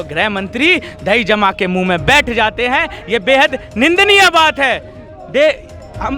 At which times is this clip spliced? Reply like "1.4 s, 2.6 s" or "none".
none